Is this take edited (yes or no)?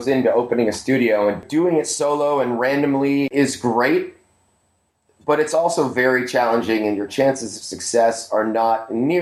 yes